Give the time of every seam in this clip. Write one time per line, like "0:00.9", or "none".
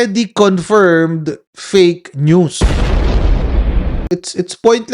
0:04.0